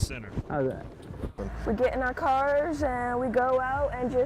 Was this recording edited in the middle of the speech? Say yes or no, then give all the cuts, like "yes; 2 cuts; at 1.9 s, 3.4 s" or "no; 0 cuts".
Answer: yes; 1 cut; at 1.3 s